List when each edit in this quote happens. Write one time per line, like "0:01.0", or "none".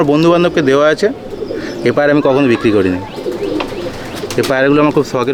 none